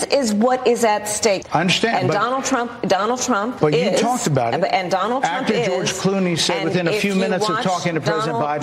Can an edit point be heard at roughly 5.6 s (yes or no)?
no